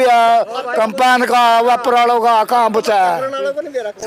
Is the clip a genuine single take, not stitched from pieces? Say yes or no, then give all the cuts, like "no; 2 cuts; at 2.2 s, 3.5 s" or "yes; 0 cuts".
yes; 0 cuts